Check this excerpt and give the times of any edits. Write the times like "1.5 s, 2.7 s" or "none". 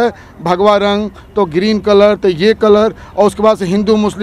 none

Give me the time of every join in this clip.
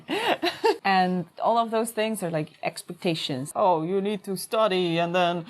0.8 s, 3.4 s

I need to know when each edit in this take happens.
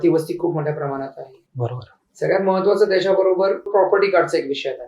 3.7 s

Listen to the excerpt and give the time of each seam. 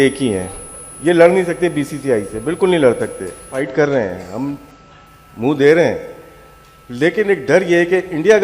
3.5 s

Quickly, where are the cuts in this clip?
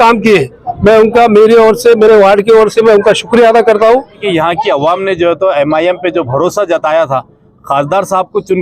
4.2 s

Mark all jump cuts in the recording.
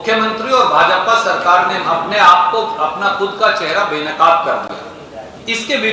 none

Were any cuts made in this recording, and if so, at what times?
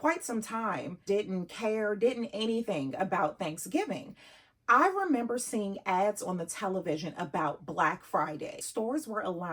8.6 s

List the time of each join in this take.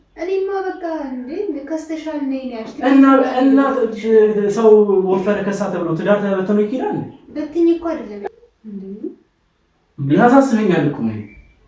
8.1 s

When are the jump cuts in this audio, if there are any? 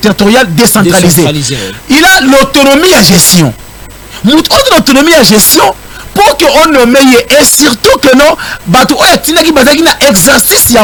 none

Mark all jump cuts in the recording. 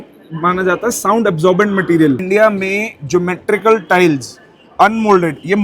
2.2 s

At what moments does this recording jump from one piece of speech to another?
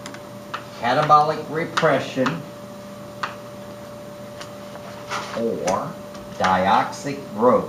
none

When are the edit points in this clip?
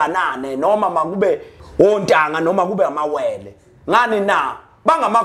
1.6 s

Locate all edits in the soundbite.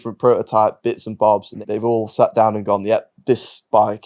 1.5 s

